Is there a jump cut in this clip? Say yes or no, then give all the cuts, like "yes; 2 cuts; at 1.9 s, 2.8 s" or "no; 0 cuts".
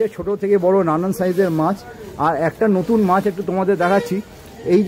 no; 0 cuts